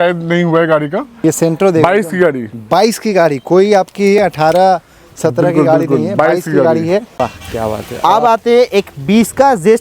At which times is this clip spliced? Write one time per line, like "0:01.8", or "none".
0:01.2
0:07.1